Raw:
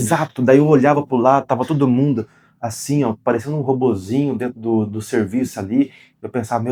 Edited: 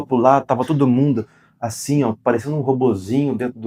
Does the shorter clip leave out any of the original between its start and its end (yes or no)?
no